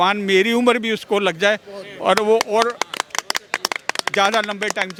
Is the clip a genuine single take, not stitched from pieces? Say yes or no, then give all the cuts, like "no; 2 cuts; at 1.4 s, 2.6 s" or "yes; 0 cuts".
yes; 0 cuts